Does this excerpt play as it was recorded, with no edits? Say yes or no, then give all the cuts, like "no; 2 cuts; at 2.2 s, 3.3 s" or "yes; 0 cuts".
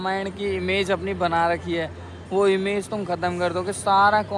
yes; 0 cuts